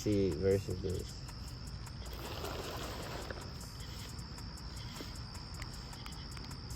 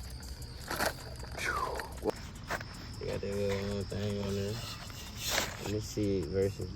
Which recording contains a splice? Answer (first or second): second